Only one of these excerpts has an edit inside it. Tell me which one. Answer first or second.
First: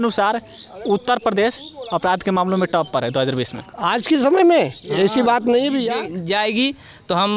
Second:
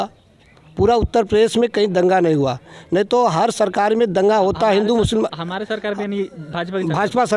first